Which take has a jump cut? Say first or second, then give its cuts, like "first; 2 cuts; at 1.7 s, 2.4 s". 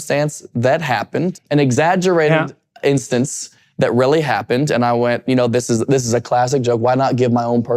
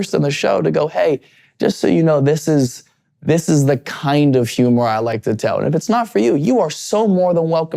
first; 1 cut; at 1.4 s